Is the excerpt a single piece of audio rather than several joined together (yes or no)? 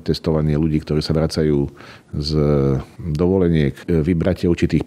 no